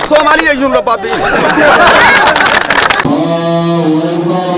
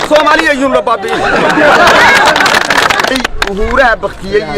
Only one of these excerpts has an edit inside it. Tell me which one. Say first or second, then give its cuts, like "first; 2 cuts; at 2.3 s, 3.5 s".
second; 1 cut; at 3.0 s